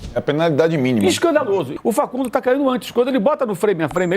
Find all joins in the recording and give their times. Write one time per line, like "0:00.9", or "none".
0:01.7